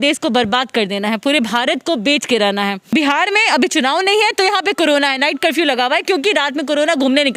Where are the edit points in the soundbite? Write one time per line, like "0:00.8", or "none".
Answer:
0:02.9